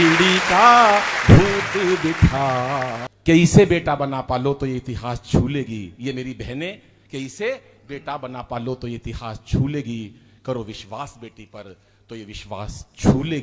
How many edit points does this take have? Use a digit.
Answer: 1